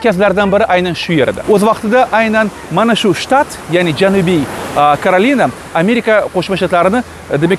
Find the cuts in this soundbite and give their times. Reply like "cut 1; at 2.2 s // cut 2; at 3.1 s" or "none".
none